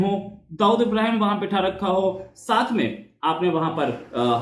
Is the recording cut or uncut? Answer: uncut